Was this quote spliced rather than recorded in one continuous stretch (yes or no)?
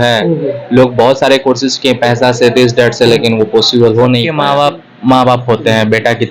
yes